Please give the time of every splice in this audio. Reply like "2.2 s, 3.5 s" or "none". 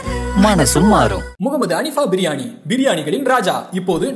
none